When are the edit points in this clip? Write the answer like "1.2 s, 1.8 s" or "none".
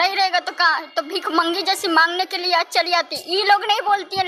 none